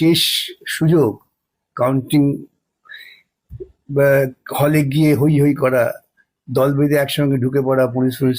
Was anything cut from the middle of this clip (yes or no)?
no